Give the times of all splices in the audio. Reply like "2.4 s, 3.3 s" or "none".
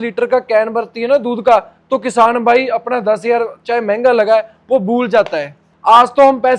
5.6 s